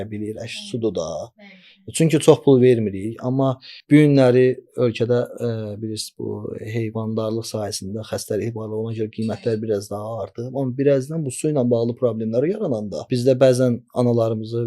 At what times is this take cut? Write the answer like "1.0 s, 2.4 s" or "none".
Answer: 3.7 s, 13.1 s